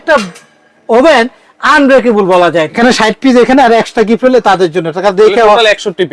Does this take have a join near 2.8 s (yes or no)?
yes